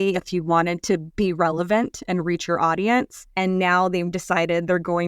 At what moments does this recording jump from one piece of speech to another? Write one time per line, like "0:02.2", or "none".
0:01.1
0:03.2